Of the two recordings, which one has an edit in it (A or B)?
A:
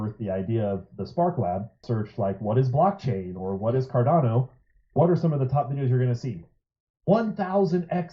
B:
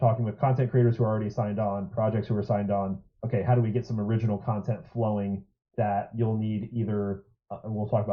A